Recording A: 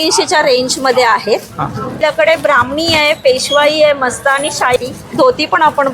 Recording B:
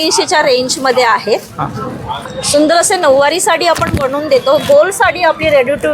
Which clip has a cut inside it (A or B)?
A